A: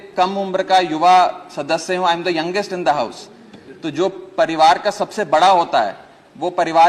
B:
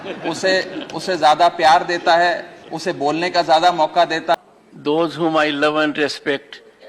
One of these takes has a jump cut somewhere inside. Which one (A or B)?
B